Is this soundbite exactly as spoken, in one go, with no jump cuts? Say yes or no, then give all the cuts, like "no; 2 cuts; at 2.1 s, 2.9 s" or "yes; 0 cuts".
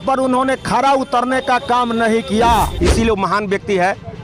no; 1 cut; at 2.7 s